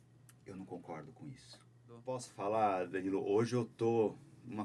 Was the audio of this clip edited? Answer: yes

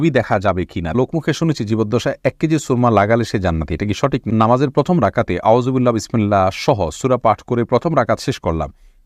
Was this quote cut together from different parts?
yes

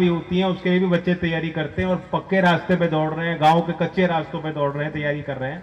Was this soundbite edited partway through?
no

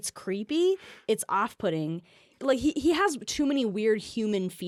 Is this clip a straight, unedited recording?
yes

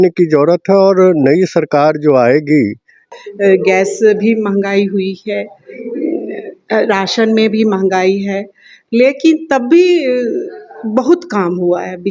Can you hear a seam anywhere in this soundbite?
yes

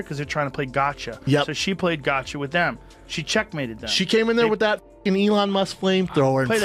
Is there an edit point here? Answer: no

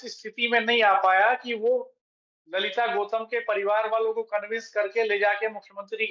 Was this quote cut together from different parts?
no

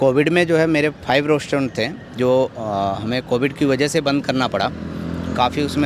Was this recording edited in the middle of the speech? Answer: no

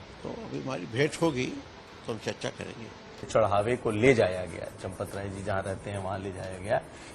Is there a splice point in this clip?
yes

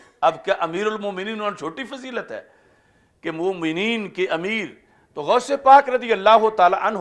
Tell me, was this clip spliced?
no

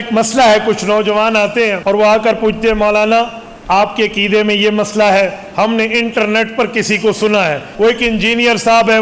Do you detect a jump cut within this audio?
yes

